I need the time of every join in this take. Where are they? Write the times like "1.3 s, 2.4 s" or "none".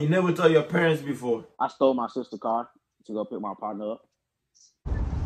1.5 s